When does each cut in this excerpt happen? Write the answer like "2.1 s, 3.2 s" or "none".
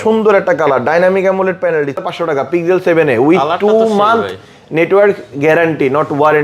2.0 s